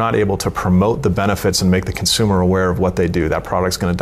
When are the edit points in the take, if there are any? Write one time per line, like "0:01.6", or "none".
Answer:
none